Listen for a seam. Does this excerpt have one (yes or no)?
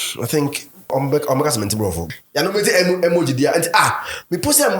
yes